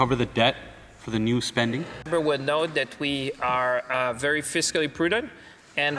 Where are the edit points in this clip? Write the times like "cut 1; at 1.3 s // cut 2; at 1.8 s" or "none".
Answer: cut 1; at 2.1 s